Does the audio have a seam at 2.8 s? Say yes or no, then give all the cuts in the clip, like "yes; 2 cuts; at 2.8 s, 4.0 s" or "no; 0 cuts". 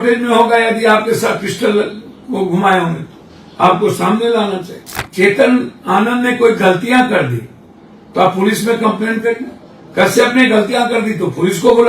no; 1 cut; at 5.0 s